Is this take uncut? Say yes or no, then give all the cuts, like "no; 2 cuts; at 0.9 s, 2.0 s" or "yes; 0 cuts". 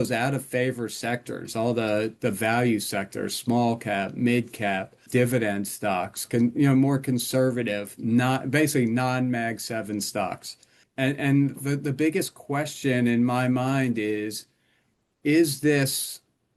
no; 2 cuts; at 5.0 s, 10.8 s